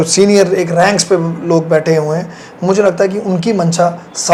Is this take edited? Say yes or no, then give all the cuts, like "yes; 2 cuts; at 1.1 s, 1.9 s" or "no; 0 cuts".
no; 0 cuts